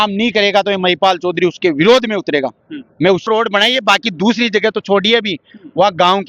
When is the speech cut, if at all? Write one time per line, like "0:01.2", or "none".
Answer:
0:03.3